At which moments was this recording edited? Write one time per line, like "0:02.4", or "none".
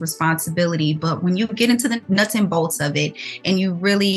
0:02.0